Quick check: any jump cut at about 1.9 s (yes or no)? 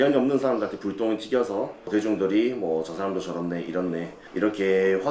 yes